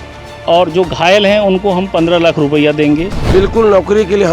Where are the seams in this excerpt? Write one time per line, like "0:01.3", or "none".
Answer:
0:03.2